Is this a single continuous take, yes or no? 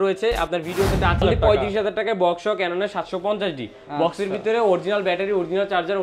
no